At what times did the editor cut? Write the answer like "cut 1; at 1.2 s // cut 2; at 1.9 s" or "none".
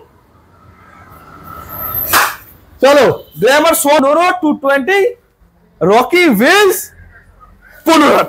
cut 1; at 4.0 s